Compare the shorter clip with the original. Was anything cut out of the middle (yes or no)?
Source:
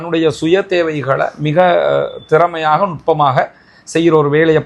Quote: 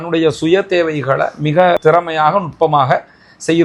yes